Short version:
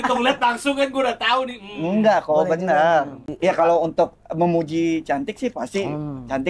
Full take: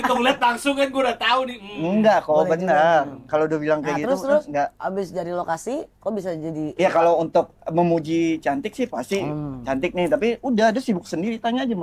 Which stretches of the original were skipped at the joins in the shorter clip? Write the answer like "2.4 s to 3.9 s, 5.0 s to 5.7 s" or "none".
3.2 s to 6.5 s